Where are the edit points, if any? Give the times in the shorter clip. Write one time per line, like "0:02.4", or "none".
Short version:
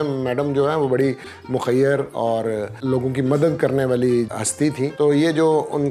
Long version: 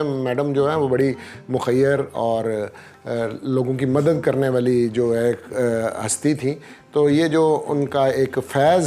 0:02.8
0:04.4